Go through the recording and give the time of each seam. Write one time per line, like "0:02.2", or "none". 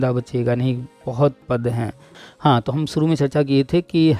0:02.1